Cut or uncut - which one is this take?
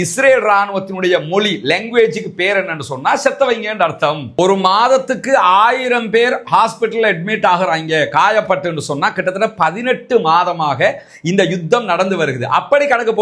cut